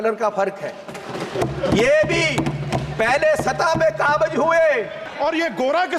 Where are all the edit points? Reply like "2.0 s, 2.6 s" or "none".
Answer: 5.0 s